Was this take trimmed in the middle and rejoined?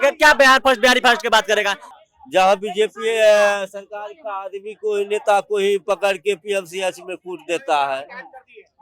yes; 1 cut; at 1.8 s

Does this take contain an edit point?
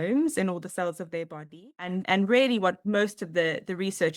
yes; 2 cuts; at 2.0 s, 2.8 s

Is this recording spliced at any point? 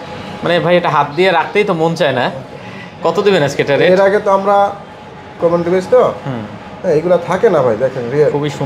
yes; 1 cut; at 5.3 s

